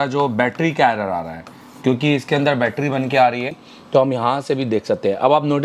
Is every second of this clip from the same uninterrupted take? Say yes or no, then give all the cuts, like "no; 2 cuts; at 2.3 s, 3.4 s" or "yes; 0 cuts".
no; 1 cut; at 3.7 s